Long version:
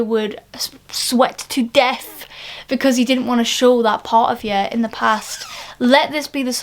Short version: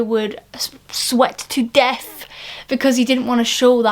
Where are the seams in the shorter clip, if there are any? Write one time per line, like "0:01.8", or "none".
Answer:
none